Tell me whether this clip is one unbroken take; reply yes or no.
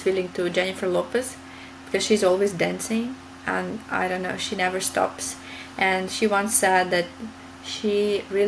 yes